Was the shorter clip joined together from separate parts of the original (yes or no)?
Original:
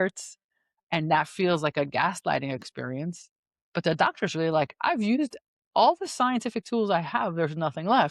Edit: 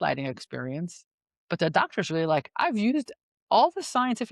no